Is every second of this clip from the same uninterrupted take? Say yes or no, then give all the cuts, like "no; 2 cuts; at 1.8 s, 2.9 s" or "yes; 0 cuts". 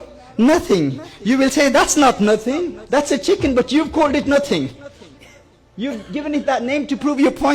yes; 0 cuts